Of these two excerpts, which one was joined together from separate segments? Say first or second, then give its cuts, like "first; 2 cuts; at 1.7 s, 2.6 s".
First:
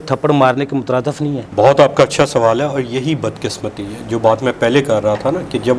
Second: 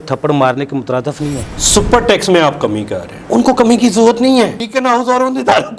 second; 2 cuts; at 1.5 s, 4.6 s